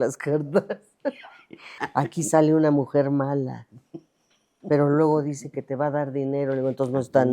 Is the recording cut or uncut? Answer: cut